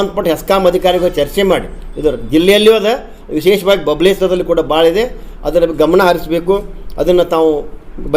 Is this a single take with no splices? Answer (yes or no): yes